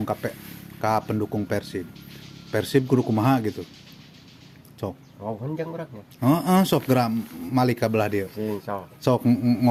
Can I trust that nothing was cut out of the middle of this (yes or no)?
yes